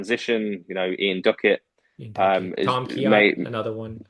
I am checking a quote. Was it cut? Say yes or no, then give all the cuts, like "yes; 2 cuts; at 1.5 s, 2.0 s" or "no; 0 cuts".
no; 0 cuts